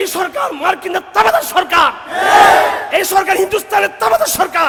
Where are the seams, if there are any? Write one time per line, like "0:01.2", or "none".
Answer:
none